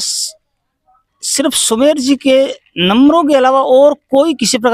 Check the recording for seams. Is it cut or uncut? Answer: uncut